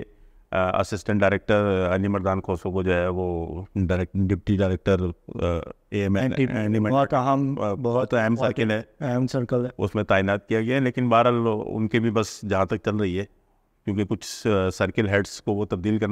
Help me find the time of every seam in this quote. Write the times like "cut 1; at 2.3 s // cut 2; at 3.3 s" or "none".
none